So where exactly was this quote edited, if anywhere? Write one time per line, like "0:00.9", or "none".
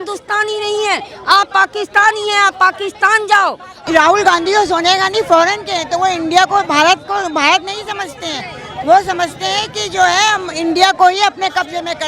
0:03.7